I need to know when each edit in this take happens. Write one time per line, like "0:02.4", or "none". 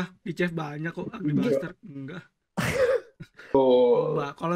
0:03.5